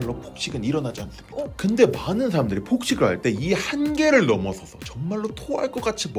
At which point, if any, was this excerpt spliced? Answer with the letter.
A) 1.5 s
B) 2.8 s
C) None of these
A